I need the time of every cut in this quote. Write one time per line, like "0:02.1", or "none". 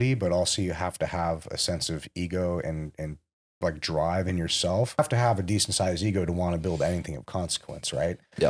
0:05.0